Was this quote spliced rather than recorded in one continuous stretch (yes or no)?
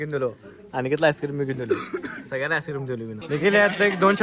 yes